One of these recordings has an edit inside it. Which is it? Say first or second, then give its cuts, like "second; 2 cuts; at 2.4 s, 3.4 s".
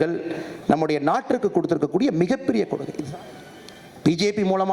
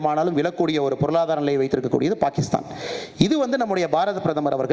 first; 1 cut; at 2.9 s